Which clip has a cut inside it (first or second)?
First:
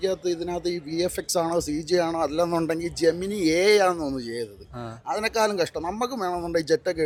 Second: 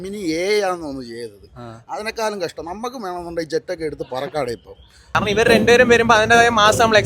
second